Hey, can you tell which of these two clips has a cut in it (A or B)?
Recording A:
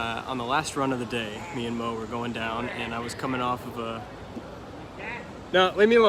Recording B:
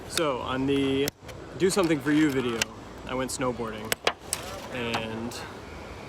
B